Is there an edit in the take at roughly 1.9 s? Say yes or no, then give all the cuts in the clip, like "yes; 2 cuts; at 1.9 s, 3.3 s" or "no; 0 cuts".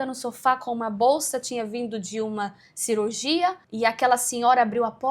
no; 1 cut; at 3.6 s